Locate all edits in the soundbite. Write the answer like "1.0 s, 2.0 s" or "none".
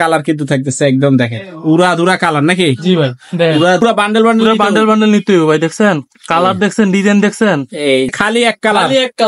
3.8 s, 8.1 s